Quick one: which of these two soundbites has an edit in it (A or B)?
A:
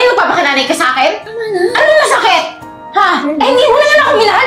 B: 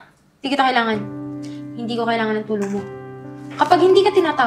A